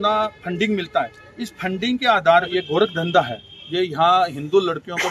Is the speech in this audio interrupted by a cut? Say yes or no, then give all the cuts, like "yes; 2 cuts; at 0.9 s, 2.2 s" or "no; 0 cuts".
yes; 1 cut; at 2.5 s